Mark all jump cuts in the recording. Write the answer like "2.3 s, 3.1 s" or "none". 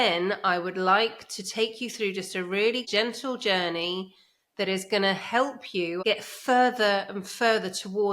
2.8 s, 6.0 s